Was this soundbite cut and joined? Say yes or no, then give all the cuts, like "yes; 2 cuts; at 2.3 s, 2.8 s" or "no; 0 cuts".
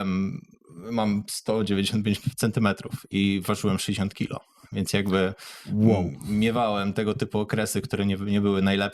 no; 0 cuts